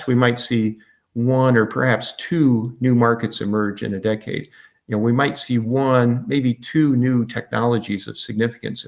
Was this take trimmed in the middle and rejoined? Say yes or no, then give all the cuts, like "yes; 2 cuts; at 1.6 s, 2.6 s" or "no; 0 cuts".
no; 0 cuts